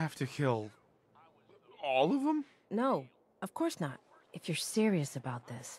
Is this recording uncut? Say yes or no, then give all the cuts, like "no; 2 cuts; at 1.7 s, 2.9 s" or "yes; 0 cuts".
yes; 0 cuts